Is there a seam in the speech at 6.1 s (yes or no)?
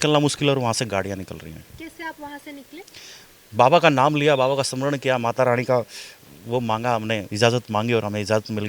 no